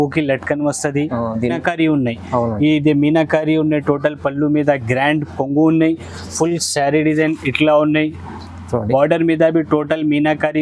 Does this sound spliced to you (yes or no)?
yes